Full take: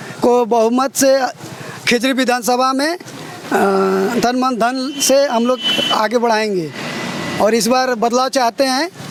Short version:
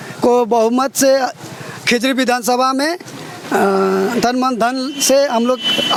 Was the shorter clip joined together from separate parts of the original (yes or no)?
no